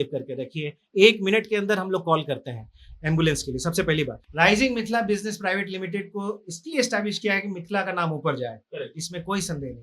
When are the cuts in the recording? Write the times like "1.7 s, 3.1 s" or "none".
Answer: 4.2 s